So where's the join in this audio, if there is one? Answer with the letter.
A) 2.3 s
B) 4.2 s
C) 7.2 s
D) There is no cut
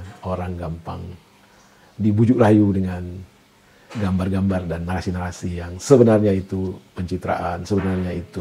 D